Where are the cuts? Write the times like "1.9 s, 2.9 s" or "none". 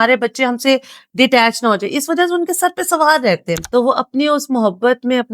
3.5 s